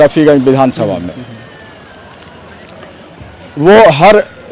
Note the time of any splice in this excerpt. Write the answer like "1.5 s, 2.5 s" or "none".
none